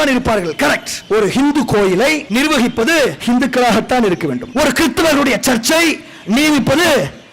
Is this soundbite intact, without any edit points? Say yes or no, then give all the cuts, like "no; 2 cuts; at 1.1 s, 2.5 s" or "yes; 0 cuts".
no; 4 cuts; at 0.9 s, 2.2 s, 3.2 s, 4.4 s